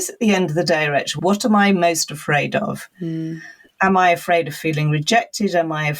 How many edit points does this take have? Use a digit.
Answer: 1